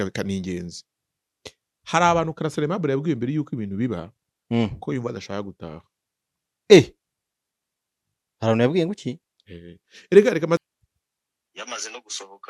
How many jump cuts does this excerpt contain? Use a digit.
1